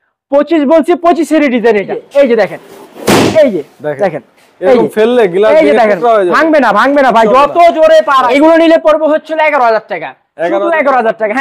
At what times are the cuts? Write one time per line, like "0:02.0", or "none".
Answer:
0:02.0
0:08.2